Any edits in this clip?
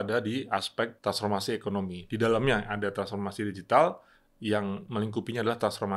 yes; 1 cut; at 1.0 s

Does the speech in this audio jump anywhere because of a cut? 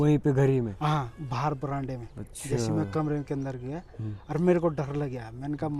no; 0 cuts

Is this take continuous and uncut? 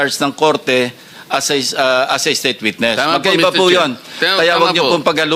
yes; 0 cuts

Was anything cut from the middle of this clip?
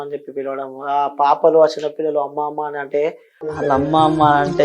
yes; 1 cut; at 3.5 s

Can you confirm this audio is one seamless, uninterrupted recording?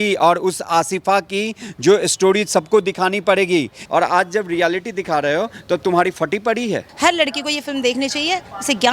no; 2 cuts; at 3.8 s, 6.9 s

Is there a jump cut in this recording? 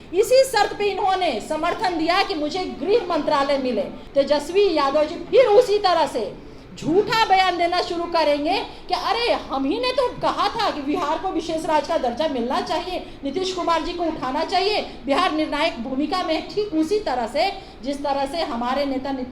yes; 1 cut; at 4.0 s

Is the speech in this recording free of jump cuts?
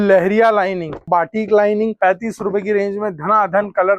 no; 2 cuts; at 1.1 s, 2.0 s

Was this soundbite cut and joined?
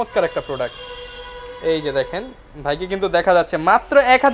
no; 0 cuts

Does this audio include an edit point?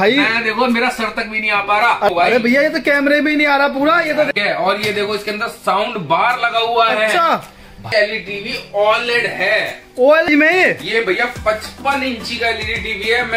yes; 4 cuts; at 2.1 s, 4.3 s, 7.9 s, 10.3 s

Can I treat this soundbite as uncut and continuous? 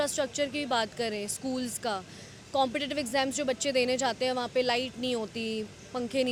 yes; 0 cuts

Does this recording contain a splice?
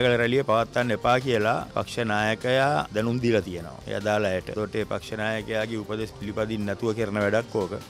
no; 0 cuts

